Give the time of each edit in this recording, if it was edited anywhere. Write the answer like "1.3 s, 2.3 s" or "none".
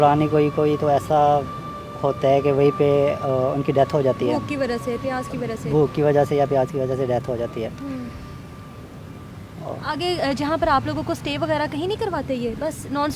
none